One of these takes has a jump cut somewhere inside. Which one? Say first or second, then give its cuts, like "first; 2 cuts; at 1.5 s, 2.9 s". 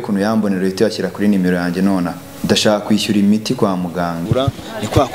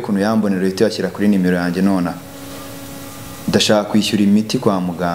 first; 2 cuts; at 2.3 s, 4.2 s